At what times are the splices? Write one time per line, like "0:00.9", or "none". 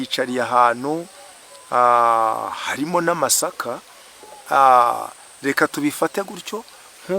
none